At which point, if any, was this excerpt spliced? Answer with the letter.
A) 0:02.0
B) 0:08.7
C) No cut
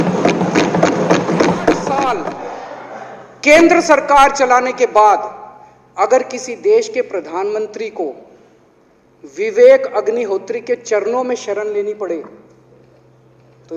A